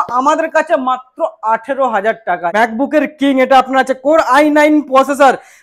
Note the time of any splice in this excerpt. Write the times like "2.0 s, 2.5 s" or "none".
2.5 s